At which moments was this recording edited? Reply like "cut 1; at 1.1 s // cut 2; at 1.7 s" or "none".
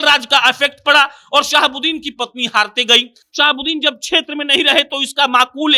none